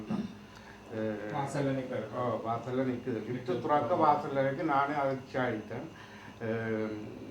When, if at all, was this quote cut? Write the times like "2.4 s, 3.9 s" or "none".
none